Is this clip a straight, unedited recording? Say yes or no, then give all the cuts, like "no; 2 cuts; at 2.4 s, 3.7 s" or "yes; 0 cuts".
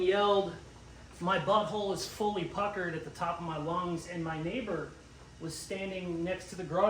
yes; 0 cuts